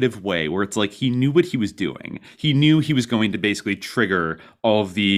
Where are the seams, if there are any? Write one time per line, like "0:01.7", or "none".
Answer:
none